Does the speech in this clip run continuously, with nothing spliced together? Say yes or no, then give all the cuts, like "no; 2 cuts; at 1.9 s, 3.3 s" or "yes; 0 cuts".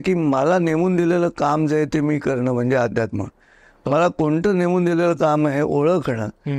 yes; 0 cuts